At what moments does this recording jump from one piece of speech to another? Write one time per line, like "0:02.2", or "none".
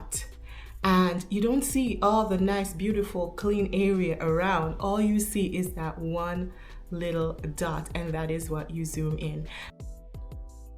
0:09.6